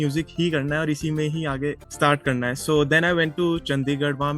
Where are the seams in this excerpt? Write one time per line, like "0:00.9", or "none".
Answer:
0:01.9